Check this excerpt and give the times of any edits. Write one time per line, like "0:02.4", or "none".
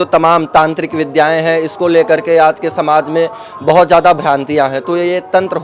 none